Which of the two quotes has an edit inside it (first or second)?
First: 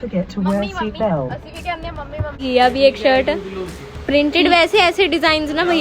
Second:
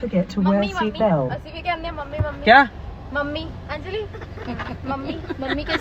first